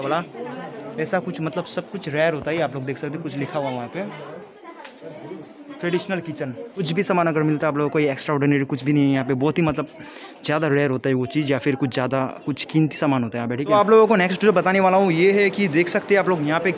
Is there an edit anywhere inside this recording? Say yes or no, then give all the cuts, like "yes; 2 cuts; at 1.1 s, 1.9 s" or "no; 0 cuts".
yes; 2 cuts; at 6.8 s, 13.7 s